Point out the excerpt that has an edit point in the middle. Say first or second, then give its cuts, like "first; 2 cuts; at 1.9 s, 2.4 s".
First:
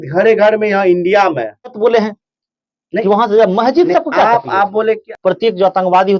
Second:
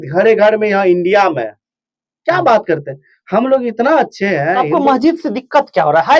first; 2 cuts; at 1.8 s, 5.1 s